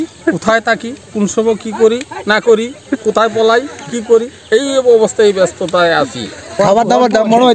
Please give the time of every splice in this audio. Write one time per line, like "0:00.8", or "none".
0:06.6